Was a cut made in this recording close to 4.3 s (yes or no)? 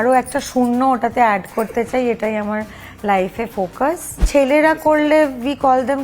yes